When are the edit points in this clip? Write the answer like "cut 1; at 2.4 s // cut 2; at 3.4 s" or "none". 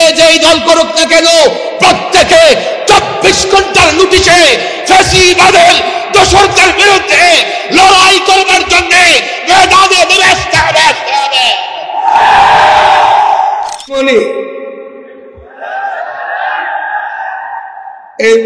cut 1; at 14.0 s